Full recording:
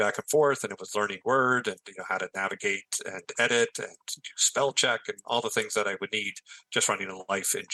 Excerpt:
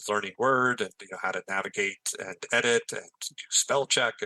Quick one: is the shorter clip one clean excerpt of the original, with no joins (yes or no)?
yes